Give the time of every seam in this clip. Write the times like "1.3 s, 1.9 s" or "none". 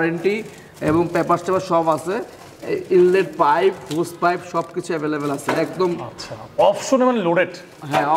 none